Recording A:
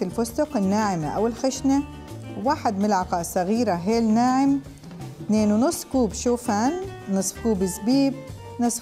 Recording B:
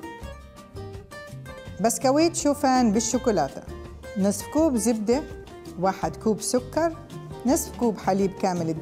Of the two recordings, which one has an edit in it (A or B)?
B